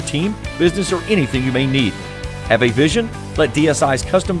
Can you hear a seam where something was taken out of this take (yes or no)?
no